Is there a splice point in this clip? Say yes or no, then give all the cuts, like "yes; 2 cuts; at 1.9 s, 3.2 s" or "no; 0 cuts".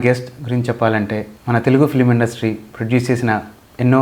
yes; 1 cut; at 1.3 s